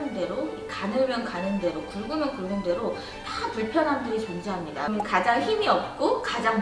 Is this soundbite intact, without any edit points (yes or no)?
yes